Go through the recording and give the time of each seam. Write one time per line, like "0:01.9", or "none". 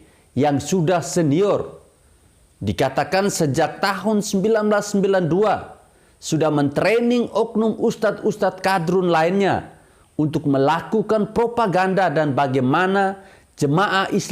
none

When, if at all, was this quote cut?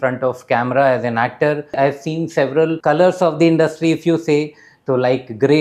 0:01.7
0:02.8

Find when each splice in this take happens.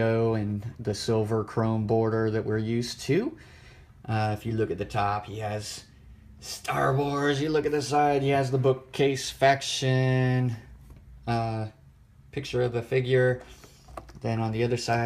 0:11.8

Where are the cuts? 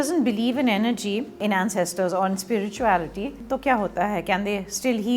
0:01.4
0:03.5

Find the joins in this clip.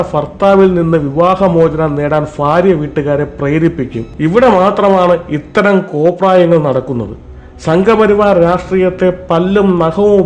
0:04.0

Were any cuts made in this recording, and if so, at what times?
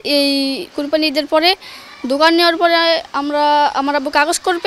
none

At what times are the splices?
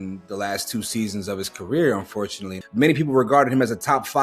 0:02.6

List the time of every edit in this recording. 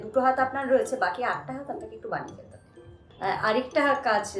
0:03.1

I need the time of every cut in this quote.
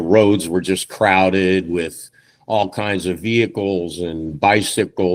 none

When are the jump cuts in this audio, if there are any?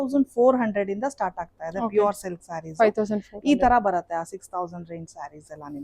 none

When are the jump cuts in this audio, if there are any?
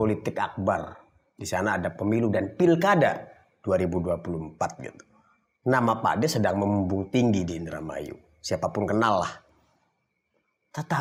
none

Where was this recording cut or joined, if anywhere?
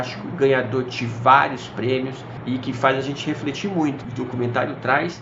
0:04.0

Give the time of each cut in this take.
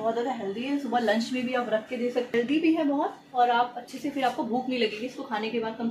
0:02.3

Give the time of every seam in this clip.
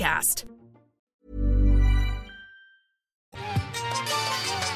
0:03.3

